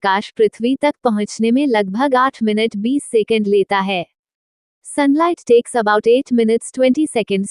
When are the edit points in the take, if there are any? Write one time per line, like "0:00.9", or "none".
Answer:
none